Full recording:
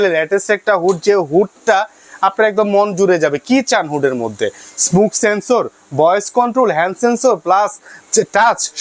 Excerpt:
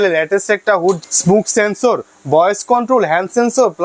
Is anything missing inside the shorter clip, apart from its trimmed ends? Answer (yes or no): yes